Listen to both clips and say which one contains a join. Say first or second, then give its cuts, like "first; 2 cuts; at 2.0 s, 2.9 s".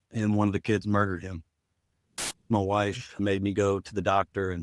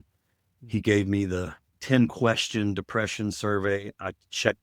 first; 2 cuts; at 2.3 s, 3.2 s